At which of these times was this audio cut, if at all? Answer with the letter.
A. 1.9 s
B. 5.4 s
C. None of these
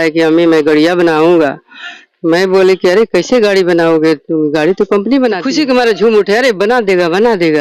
B